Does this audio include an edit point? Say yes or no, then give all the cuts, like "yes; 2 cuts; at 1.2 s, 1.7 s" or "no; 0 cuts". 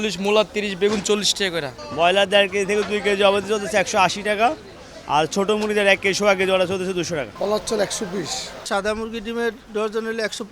yes; 3 cuts; at 1.8 s, 7.3 s, 8.7 s